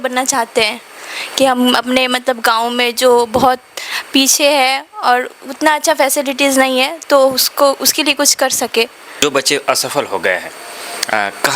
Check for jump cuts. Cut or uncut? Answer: cut